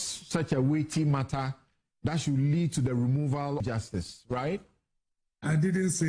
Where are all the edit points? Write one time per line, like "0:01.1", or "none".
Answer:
0:03.6